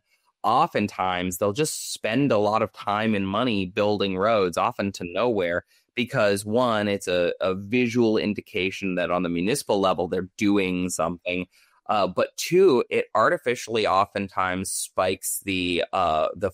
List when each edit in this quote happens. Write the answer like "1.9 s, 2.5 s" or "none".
none